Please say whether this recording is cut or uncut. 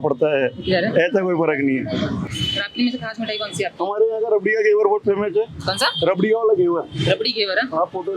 uncut